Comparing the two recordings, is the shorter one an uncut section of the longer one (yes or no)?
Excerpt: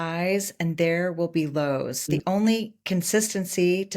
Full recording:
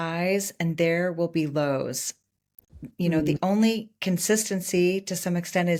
no